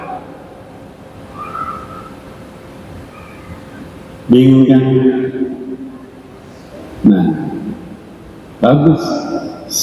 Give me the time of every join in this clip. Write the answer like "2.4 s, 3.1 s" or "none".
none